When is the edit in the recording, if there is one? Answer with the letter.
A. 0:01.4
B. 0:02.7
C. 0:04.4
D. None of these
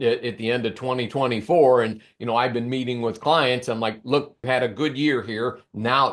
C